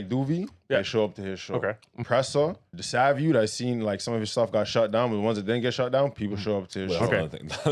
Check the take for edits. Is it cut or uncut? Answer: cut